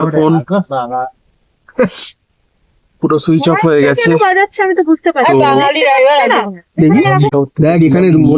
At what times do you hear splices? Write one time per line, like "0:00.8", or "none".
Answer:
0:07.3